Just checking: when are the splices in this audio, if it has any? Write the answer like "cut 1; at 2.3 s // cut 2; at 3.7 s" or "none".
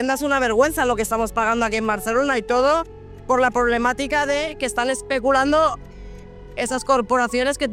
none